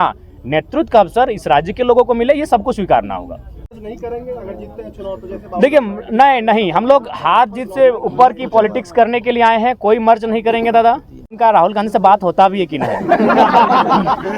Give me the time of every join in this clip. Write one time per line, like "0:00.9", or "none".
0:03.8
0:11.3